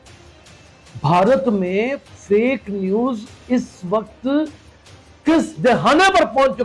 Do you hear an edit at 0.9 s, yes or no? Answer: yes